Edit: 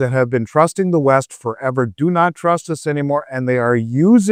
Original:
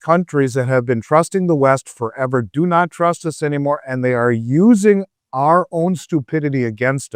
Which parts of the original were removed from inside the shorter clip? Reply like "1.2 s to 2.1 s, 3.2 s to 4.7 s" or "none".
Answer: none